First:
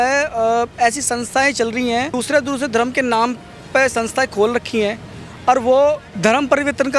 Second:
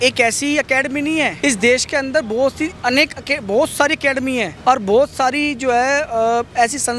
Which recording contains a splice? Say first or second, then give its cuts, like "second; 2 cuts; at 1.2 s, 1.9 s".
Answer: first; 2 cuts; at 2.1 s, 6.1 s